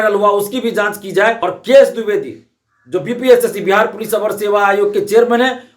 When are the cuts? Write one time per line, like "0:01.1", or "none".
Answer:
0:01.5